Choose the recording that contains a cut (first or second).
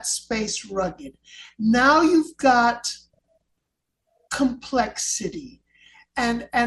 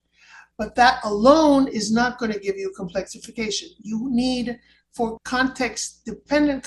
second